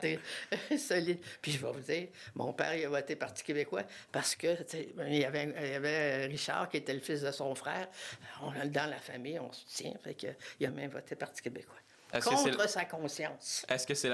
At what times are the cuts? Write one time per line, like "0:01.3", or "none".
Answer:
none